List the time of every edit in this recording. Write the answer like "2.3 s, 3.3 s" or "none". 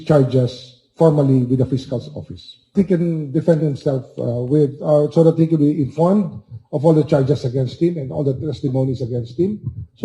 2.7 s